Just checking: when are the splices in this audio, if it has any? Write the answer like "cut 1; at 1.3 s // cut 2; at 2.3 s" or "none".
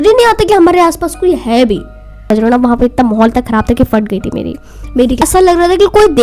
cut 1; at 2.3 s // cut 2; at 5.2 s